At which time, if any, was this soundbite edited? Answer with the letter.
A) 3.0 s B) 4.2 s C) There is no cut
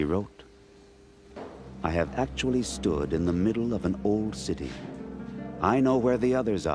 B